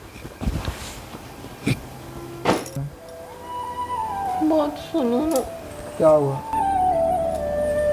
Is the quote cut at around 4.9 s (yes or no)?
no